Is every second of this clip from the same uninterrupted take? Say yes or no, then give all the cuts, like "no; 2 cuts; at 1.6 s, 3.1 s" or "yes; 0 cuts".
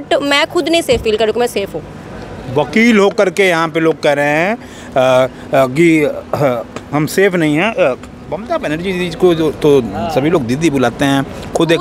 yes; 0 cuts